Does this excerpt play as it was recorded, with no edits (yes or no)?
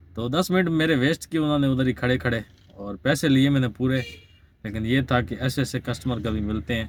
yes